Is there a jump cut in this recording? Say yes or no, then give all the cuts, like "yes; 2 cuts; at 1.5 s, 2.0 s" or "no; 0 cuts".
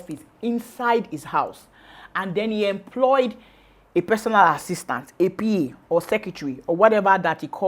no; 0 cuts